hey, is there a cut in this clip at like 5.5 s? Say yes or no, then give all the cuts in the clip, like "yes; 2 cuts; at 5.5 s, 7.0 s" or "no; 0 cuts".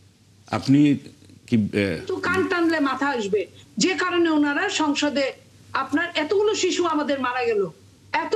no; 1 cut; at 2.1 s